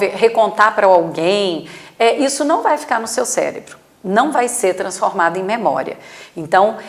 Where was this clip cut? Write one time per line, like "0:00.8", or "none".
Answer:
none